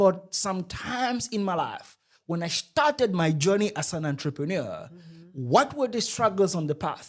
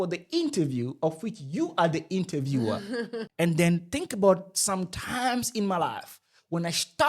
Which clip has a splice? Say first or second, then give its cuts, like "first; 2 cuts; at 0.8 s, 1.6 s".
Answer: second; 1 cut; at 3.2 s